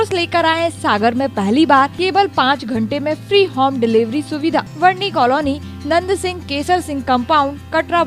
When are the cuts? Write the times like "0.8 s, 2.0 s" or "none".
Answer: 1.9 s, 4.7 s